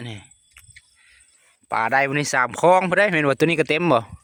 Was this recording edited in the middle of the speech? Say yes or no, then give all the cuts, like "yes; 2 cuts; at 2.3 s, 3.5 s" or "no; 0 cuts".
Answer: no; 0 cuts